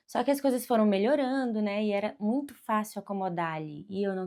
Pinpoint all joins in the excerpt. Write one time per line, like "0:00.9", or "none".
none